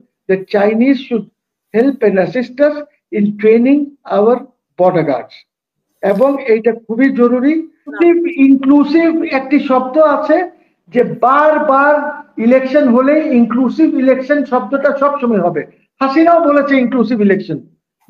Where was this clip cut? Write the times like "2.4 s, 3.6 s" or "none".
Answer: 8.0 s

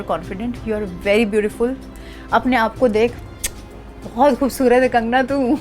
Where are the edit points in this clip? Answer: none

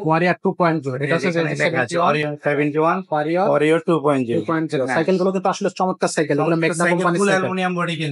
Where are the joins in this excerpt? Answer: none

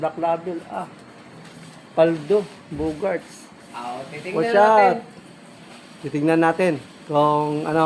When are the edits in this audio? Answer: none

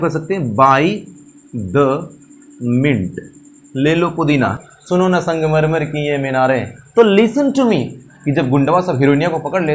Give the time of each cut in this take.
4.5 s, 8.2 s

